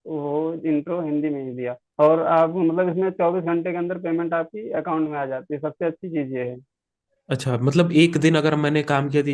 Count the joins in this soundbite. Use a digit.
1